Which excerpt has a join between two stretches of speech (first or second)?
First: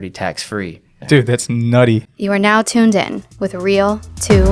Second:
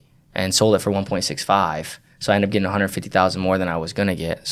first